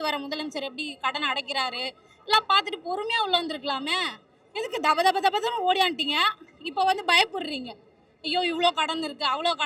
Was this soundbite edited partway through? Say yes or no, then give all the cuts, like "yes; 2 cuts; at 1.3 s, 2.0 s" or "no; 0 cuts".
no; 0 cuts